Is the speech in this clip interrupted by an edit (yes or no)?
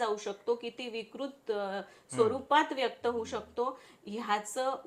no